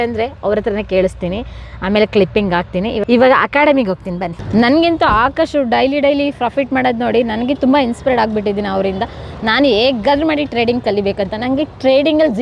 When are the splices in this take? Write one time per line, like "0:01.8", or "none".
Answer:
none